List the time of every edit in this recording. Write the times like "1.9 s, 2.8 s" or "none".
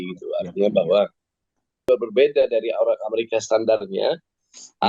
1.8 s